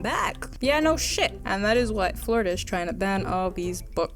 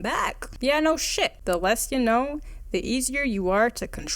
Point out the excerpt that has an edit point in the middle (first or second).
second